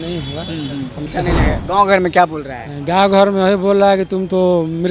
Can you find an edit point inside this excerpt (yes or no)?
yes